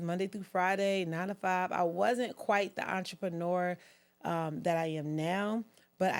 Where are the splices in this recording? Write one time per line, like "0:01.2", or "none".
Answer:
none